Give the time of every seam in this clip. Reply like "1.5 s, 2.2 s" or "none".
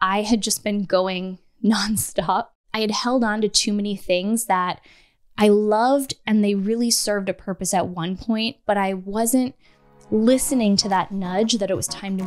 2.6 s